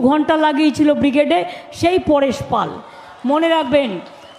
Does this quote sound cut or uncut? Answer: uncut